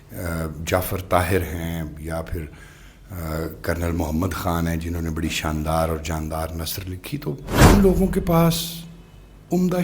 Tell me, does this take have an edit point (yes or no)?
yes